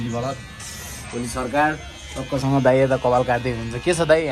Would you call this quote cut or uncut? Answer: uncut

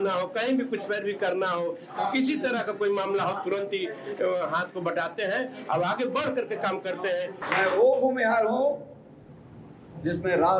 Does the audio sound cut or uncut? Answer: cut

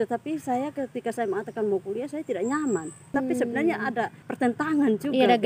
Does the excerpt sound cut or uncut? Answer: cut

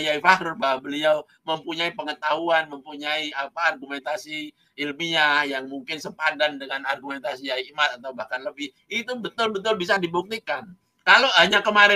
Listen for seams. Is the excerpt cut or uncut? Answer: uncut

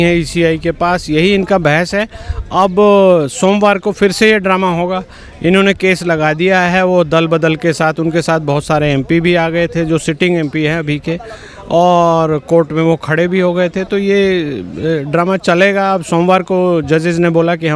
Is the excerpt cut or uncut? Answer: uncut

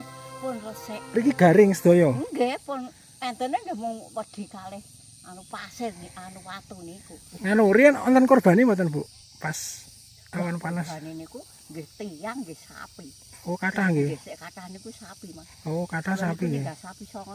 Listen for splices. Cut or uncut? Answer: cut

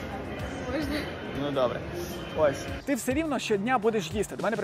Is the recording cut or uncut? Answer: cut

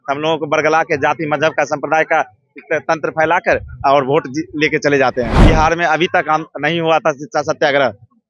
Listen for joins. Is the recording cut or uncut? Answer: cut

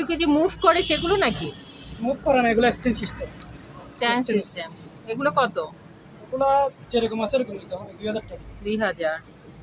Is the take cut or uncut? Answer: uncut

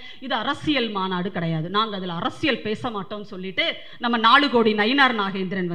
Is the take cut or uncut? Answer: uncut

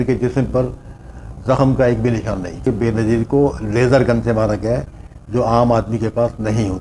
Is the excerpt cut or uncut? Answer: cut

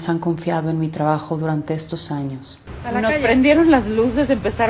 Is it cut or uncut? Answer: cut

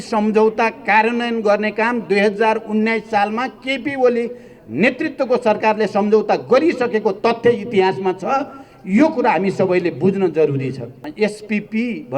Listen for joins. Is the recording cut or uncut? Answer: cut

